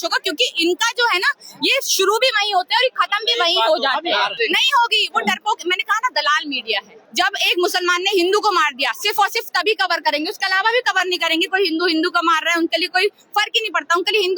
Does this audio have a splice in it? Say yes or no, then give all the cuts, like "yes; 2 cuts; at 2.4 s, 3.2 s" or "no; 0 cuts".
yes; 2 cuts; at 4.3 s, 7.0 s